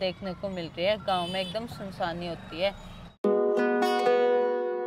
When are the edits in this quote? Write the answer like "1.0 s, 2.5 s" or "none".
none